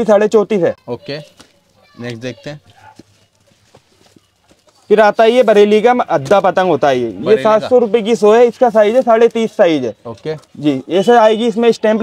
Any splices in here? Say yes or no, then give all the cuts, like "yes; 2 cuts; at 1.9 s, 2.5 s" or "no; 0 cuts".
no; 0 cuts